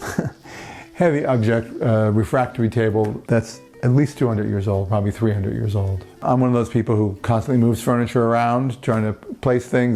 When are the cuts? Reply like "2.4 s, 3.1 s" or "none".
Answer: 3.3 s, 6.2 s